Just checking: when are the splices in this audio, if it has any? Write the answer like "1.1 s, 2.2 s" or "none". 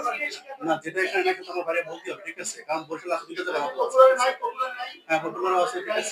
none